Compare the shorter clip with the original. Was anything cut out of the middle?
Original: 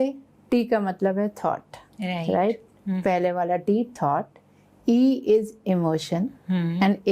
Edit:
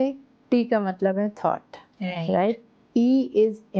yes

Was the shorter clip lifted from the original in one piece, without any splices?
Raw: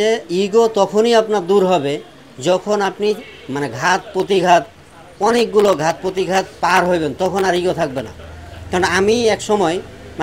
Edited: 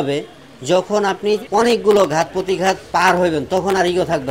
no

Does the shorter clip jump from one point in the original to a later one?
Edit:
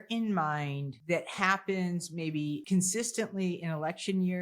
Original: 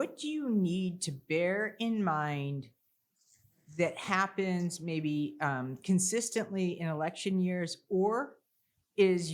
yes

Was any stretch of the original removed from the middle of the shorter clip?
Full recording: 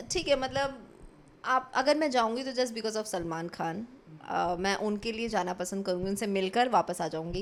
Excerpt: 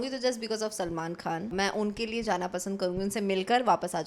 yes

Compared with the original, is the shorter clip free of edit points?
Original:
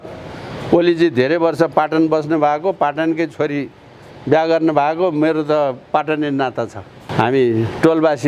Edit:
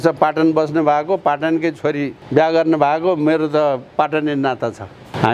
no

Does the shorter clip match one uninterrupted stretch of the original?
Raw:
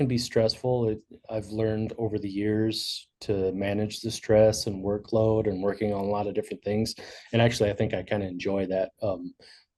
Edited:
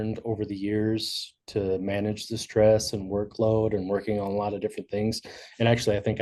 yes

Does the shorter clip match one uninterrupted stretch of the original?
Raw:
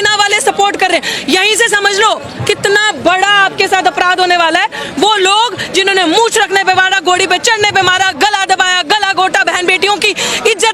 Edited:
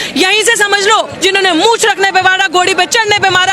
no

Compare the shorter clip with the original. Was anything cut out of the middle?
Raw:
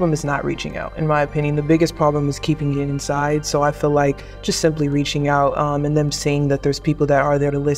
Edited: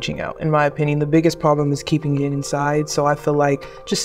no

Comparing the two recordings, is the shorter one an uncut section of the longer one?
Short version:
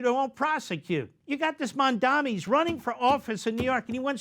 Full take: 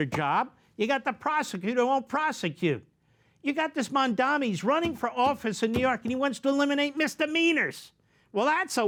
no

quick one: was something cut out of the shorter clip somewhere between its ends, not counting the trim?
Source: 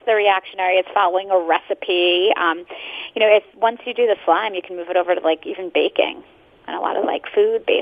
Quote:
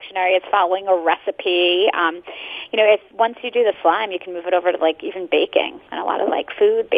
yes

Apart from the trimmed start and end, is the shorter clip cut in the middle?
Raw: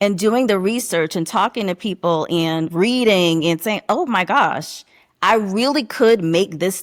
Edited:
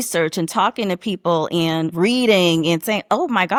no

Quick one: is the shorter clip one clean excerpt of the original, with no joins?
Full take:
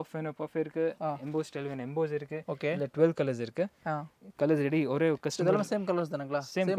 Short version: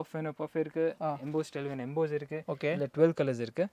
yes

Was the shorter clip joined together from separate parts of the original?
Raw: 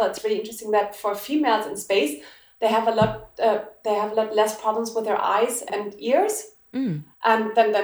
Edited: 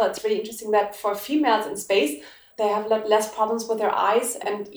yes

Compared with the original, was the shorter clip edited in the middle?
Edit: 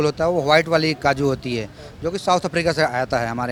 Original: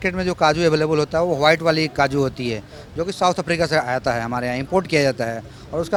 no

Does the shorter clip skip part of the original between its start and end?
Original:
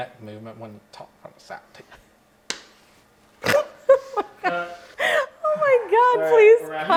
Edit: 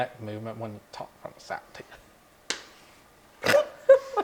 no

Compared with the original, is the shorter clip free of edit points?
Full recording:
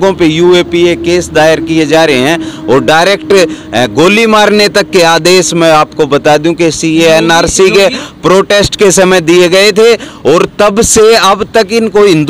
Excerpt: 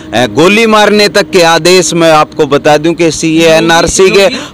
yes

